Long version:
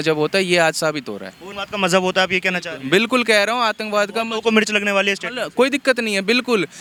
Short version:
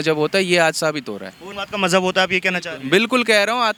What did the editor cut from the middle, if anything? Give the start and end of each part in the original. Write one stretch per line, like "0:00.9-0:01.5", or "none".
none